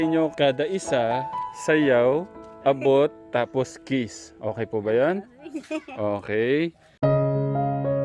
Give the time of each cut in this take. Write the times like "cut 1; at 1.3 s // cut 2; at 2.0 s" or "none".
cut 1; at 6.8 s